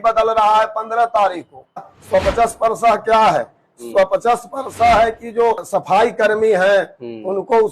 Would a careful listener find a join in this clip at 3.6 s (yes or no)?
no